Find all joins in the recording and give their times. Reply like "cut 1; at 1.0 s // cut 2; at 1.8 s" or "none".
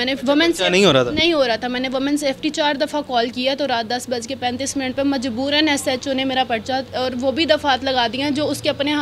none